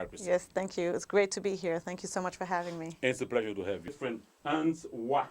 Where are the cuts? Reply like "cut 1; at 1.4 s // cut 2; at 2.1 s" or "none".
cut 1; at 4.0 s

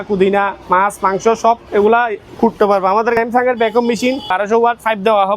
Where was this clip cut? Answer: cut 1; at 3.2 s // cut 2; at 4.3 s

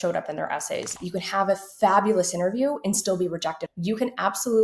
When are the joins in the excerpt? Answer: cut 1; at 1.0 s // cut 2; at 3.7 s

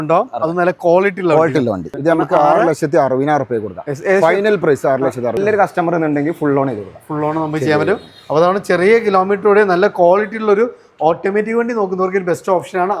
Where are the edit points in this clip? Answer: cut 1; at 1.9 s // cut 2; at 5.4 s

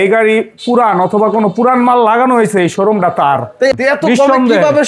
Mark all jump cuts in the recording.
cut 1; at 3.8 s

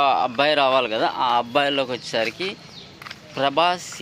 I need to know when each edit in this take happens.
none

